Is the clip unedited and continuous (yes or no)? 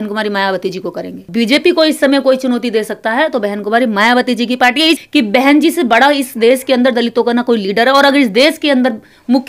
no